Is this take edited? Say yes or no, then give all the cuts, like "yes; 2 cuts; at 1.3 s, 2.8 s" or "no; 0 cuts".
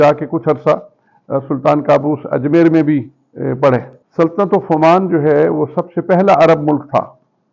yes; 1 cut; at 4.0 s